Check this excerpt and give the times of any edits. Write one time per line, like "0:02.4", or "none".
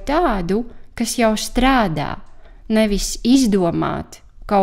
none